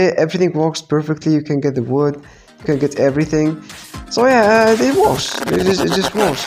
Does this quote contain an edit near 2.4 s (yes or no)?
no